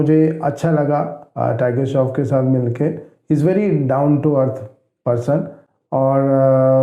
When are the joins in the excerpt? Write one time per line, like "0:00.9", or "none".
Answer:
none